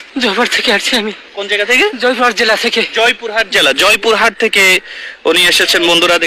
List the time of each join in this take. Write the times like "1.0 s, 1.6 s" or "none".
none